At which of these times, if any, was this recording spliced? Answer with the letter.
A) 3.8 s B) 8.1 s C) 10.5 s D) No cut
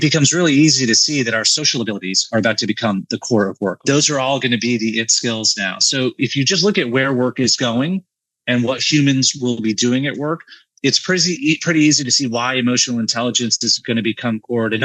A